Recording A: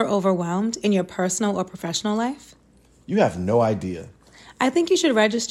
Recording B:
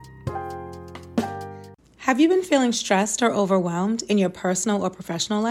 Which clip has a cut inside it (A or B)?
B